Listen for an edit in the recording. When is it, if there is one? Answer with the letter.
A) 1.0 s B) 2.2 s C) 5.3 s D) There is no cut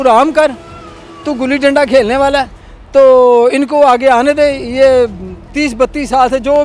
D